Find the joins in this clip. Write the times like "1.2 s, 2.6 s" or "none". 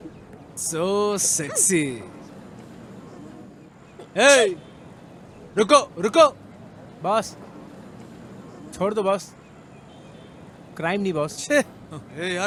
none